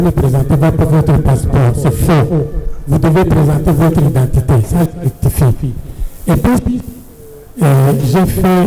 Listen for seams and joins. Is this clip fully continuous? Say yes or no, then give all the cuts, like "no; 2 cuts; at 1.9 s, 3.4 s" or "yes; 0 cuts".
yes; 0 cuts